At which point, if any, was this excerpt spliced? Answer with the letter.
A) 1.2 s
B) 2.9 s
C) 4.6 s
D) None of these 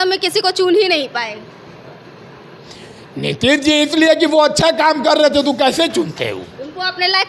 D